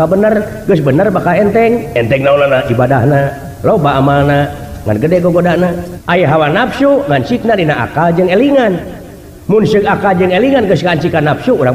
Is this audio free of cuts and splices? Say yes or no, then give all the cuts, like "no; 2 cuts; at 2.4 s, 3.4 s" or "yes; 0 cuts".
no; 1 cut; at 5.9 s